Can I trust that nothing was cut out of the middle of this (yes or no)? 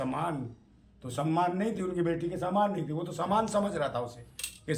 yes